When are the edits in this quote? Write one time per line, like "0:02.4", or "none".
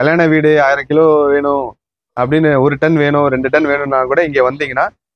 none